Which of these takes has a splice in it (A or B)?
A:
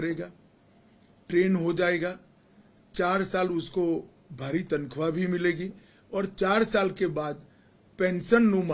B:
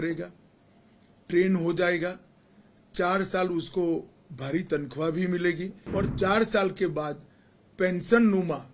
B